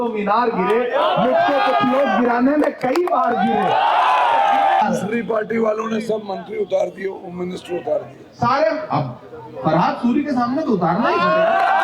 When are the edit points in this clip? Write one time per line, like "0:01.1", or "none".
0:04.8